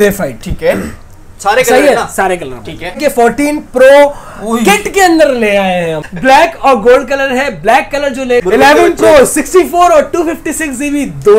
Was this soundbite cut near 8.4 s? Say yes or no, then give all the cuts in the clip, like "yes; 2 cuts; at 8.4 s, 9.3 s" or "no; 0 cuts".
yes; 3 cuts; at 3.0 s, 6.0 s, 8.4 s